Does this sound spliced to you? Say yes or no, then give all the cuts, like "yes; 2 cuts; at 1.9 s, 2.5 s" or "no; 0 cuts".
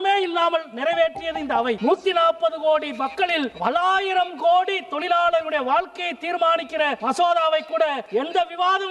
yes; 4 cuts; at 1.8 s, 3.5 s, 7.0 s, 8.0 s